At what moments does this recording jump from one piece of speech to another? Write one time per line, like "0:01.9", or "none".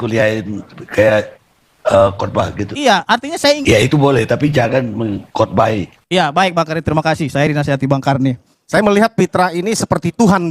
0:03.6
0:08.5